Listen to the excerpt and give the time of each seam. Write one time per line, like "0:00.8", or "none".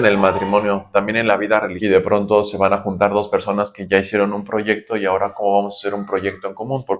0:01.7

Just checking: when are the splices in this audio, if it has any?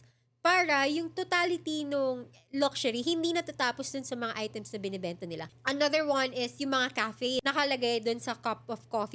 0:05.5
0:07.4

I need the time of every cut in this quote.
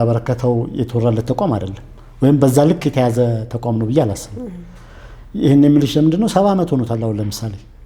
none

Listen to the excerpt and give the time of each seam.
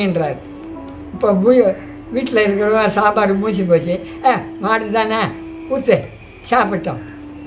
none

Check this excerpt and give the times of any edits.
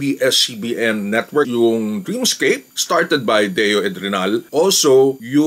0:01.5
0:02.7
0:04.5

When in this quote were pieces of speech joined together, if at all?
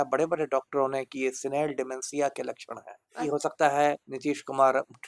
0:03.2

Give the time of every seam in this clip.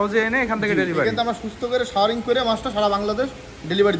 none

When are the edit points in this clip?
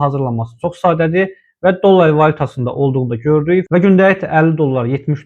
none

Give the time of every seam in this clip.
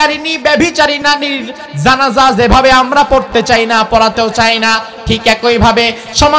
0:01.0

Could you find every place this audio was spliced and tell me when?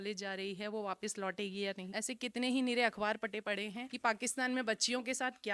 none

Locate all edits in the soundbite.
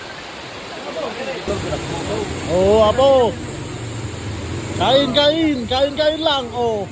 0:01.5

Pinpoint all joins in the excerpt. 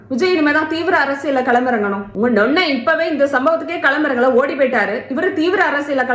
0:02.1

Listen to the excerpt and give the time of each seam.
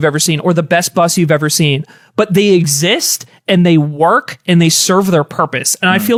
none

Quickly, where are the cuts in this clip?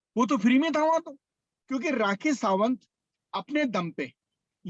0:01.5

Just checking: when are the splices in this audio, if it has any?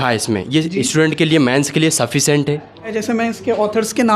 0:02.9

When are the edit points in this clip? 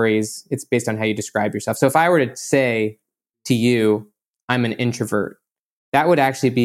none

